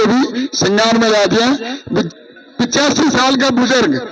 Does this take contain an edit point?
yes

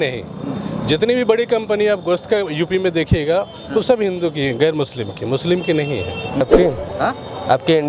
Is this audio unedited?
no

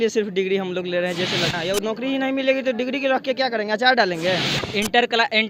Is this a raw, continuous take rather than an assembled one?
no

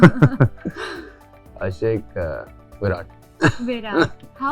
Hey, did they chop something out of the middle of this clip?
no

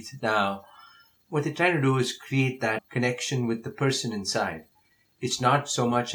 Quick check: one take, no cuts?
yes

